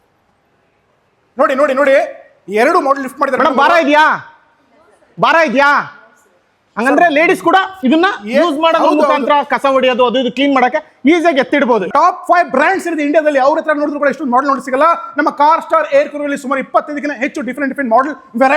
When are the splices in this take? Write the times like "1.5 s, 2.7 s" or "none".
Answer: 11.9 s